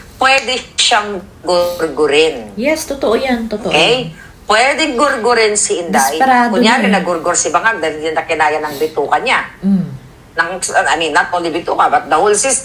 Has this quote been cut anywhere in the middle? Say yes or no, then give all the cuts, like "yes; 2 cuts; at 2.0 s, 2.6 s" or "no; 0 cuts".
no; 0 cuts